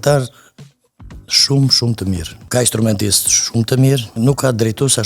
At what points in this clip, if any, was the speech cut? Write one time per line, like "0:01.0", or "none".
0:02.3
0:04.1